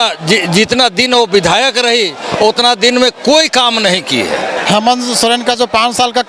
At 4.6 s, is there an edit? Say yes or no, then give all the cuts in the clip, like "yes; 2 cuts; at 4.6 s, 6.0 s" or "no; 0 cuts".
yes; 1 cut; at 4.6 s